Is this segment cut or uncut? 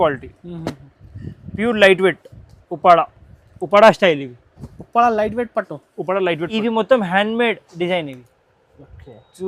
cut